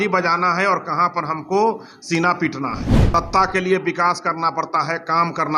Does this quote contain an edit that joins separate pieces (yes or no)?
yes